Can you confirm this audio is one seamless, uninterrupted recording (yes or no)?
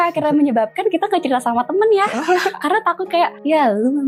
yes